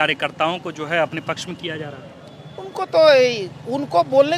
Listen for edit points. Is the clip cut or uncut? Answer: uncut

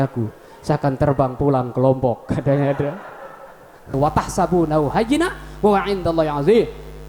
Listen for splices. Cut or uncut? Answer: cut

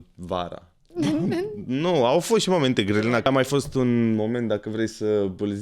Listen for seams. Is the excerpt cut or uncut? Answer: cut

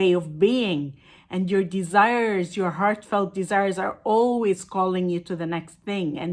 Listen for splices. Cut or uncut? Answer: uncut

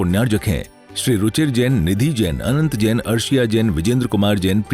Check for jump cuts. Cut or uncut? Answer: uncut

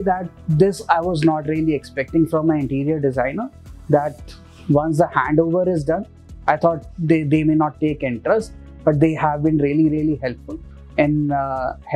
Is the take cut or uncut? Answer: uncut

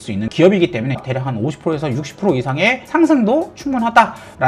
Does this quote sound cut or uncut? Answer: cut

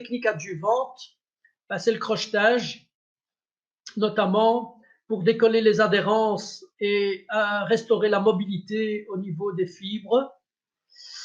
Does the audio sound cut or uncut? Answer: uncut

